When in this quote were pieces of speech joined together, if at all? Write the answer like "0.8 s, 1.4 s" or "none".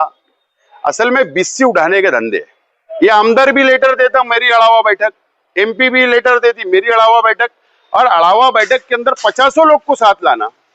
2.8 s